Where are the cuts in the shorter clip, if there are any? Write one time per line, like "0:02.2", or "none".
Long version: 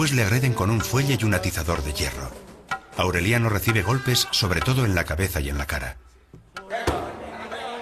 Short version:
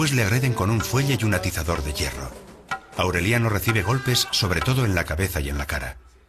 none